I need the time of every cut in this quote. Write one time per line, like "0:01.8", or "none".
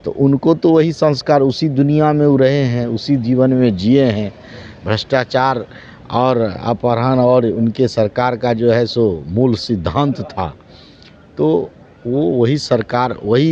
none